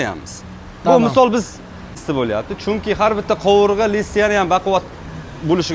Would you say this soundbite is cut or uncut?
cut